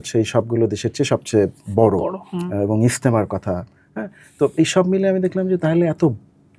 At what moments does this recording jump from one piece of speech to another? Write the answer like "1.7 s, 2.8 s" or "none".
none